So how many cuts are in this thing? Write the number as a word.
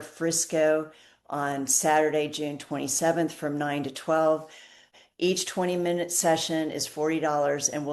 one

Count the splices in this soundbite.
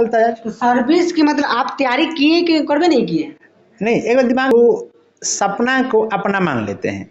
one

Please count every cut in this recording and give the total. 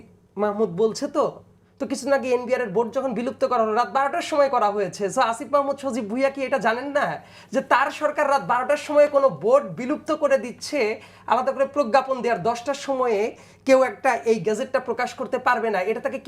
zero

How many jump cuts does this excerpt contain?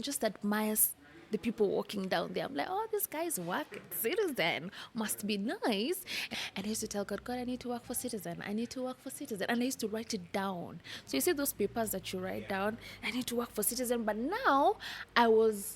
one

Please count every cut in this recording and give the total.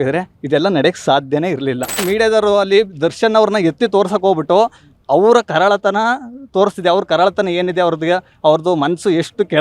one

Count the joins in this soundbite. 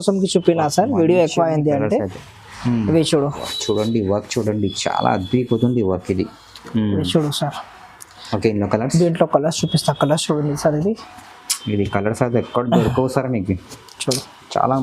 one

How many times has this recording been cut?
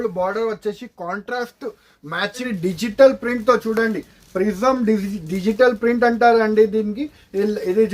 one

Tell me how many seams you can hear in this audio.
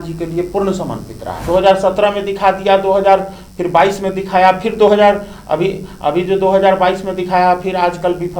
one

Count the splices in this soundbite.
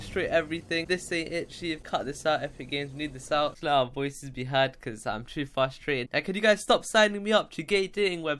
one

